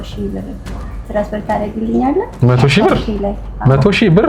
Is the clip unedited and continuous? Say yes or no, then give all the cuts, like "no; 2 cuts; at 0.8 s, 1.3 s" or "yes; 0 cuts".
yes; 0 cuts